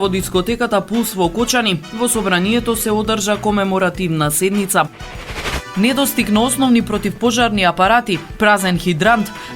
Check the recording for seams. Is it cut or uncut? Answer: cut